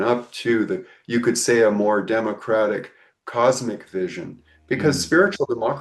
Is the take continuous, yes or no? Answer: yes